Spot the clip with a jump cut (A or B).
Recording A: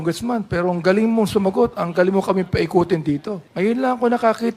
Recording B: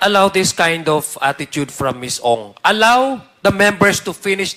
A